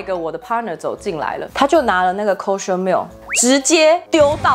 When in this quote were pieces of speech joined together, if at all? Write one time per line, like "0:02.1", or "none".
0:01.5